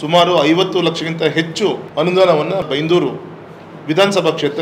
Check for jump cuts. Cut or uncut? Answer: cut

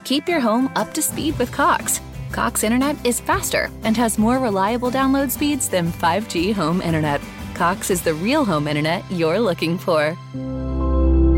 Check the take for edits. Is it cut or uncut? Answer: uncut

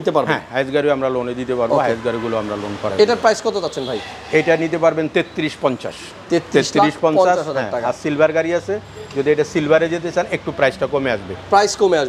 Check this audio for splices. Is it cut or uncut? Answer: uncut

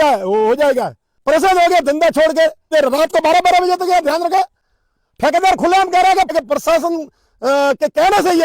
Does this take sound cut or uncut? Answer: cut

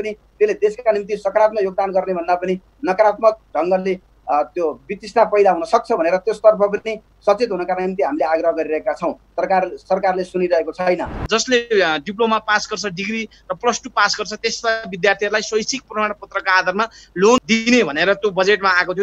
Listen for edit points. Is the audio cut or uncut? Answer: cut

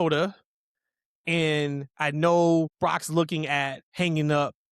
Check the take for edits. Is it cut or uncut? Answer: cut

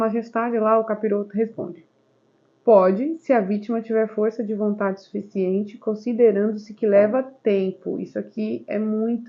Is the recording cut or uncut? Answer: uncut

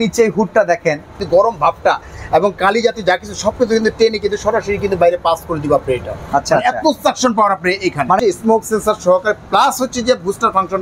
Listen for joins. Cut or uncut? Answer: cut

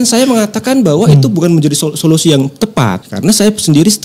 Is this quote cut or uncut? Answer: cut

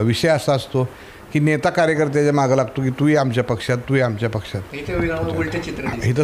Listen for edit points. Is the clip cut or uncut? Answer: uncut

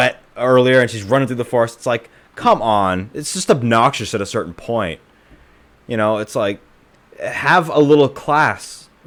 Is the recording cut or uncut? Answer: uncut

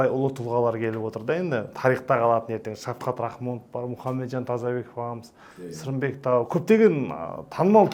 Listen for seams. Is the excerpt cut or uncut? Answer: uncut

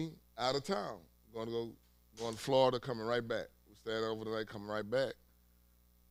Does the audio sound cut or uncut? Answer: uncut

